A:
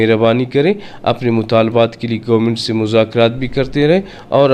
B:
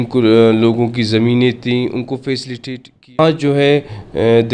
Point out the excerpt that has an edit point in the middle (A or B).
B